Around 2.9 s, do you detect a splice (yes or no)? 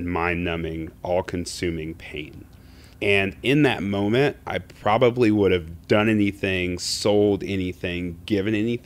yes